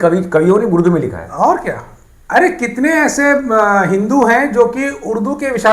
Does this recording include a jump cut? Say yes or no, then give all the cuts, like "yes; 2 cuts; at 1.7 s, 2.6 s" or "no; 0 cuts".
no; 0 cuts